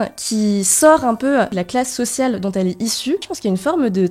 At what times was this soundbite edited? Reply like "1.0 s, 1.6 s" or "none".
1.6 s, 3.3 s